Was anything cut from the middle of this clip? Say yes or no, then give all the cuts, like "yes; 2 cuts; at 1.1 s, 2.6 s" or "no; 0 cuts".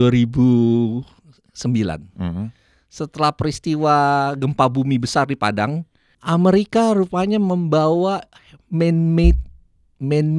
no; 0 cuts